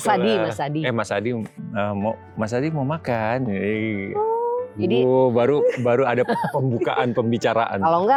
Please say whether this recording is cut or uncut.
uncut